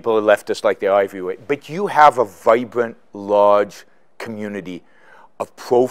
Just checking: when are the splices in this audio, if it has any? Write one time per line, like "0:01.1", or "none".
none